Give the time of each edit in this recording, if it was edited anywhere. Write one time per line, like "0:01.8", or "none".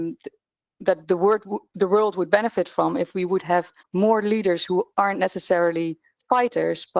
0:03.8